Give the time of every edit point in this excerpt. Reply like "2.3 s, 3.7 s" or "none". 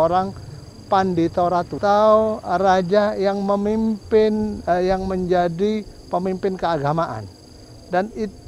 1.7 s